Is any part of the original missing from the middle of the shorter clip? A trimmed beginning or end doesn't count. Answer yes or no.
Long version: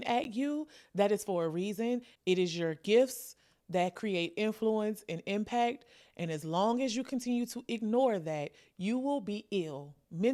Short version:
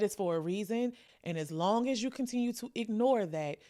yes